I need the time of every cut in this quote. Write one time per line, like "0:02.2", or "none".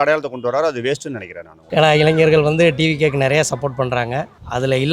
0:01.5